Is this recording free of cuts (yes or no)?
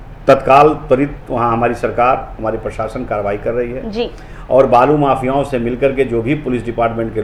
yes